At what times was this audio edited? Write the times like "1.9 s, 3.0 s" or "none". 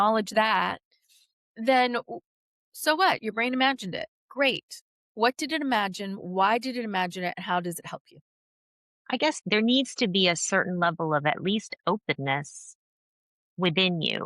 9.4 s